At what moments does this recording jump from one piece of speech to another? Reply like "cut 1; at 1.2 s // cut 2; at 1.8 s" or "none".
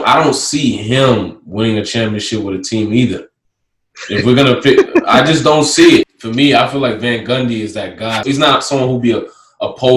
cut 1; at 6.1 s // cut 2; at 8.3 s